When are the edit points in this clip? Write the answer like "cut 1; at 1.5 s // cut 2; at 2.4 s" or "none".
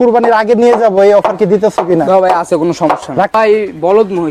cut 1; at 3.3 s